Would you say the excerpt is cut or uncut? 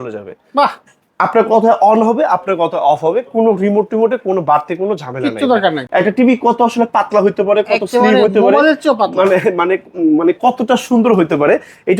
cut